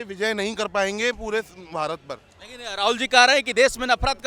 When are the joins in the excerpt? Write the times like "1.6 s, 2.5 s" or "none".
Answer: none